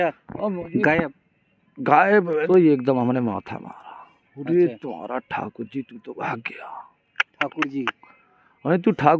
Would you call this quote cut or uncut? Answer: cut